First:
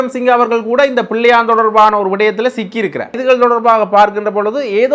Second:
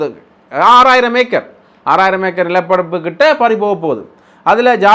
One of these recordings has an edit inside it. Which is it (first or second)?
first